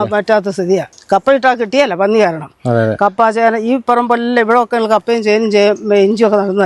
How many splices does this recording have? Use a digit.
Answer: 1